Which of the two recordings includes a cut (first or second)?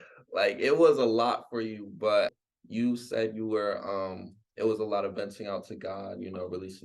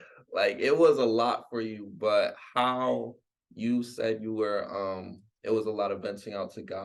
first